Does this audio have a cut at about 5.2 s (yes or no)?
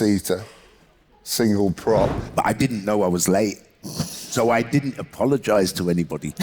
no